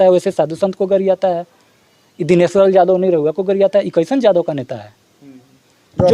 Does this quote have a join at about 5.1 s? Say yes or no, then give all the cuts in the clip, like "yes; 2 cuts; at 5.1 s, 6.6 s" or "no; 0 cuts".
no; 0 cuts